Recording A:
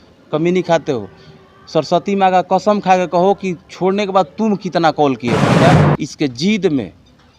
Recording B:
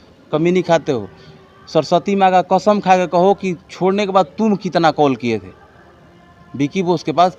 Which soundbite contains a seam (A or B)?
A